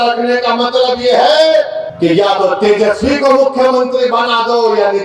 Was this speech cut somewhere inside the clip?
yes; 1 cut; at 1.8 s

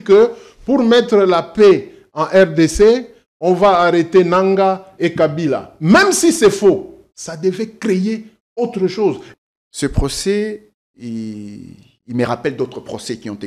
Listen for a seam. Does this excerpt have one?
yes; 1 cut; at 9.2 s

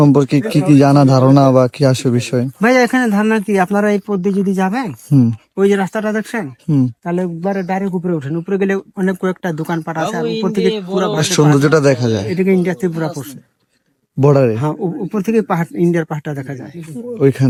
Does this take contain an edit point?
no; 0 cuts

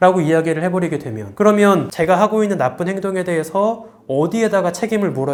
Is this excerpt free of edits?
yes; 0 cuts

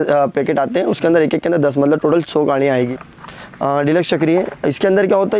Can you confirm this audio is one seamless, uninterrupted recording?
no; 1 cut; at 3.0 s

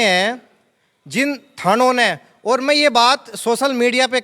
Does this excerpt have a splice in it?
no; 0 cuts

